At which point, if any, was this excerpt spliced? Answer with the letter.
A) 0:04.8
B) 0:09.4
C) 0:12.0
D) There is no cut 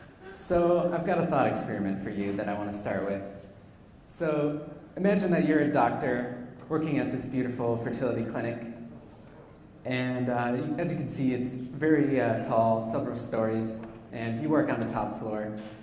C